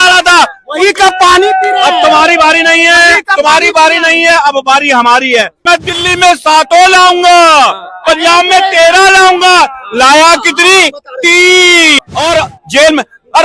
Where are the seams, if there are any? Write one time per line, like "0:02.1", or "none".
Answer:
0:05.5
0:12.0